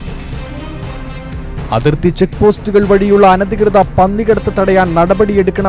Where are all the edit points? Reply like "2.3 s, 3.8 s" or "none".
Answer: 1.4 s